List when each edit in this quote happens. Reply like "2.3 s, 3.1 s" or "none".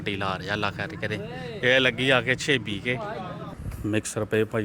3.5 s